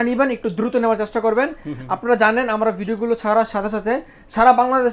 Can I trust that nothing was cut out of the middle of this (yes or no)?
yes